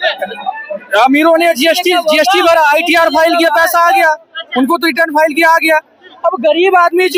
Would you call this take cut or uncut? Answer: uncut